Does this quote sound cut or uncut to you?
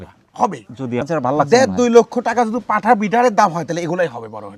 cut